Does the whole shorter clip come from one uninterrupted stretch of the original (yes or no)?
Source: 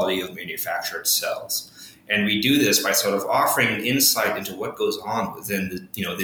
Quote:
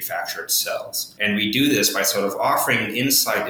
no